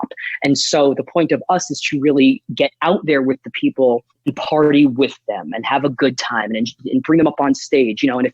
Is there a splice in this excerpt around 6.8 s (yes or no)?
no